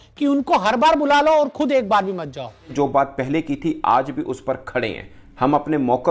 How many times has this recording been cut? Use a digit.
1